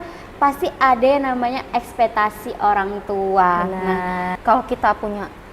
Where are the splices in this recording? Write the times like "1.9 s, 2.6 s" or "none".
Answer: 4.3 s